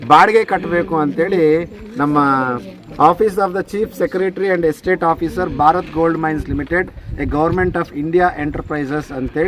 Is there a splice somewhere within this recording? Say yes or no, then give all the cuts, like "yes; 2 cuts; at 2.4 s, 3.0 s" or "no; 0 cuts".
no; 0 cuts